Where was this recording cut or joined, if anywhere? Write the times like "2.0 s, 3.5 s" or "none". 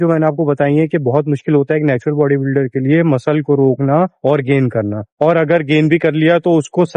none

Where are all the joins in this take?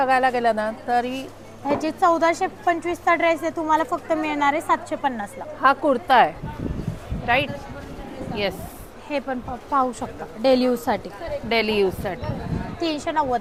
none

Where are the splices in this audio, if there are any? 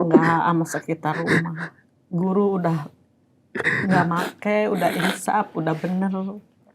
none

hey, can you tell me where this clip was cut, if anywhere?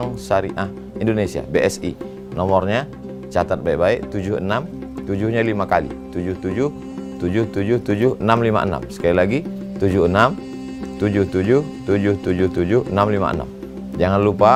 none

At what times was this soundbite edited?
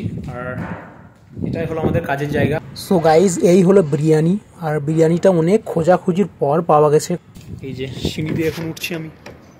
2.6 s, 7.2 s

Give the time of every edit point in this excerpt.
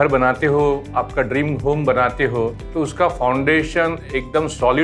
none

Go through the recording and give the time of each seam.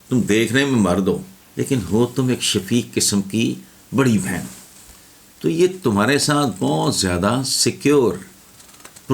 1.4 s

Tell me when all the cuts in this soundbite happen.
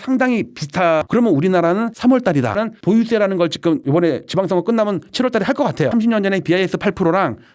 1.1 s, 2.6 s, 5.9 s

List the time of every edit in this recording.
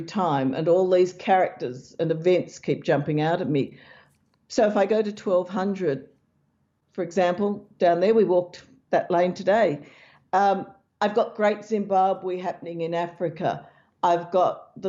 none

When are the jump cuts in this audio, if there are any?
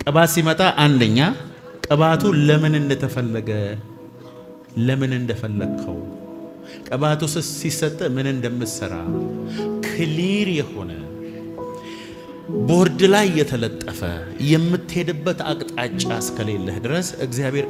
none

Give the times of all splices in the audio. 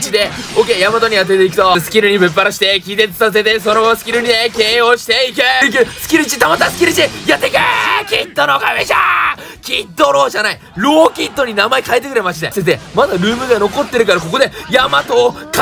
1.8 s, 5.6 s, 12.5 s

